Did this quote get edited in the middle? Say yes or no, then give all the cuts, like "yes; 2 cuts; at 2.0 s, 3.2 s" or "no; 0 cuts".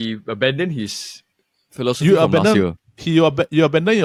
no; 0 cuts